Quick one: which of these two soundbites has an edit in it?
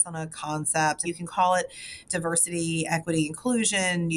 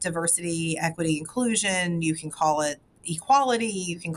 first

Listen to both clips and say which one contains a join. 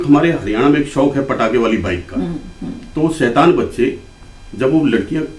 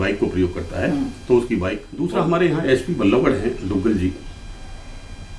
second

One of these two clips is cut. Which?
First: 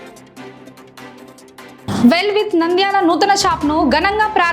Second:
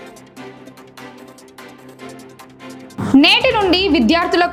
first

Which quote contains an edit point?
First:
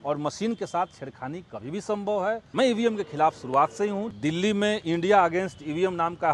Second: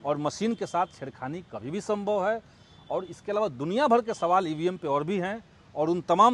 first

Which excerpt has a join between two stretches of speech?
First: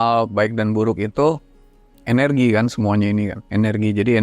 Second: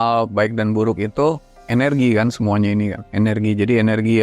second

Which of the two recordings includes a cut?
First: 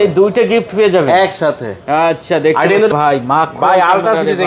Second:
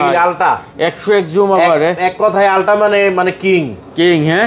first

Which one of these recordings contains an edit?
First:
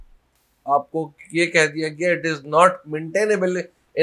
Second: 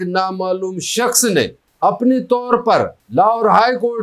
second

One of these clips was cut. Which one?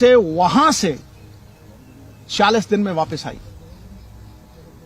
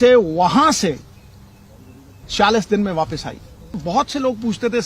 second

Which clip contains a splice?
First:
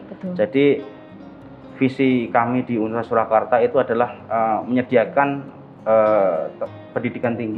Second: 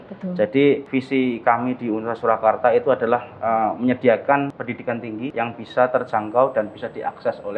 second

